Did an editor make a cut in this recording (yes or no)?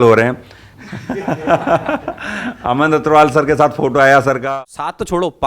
yes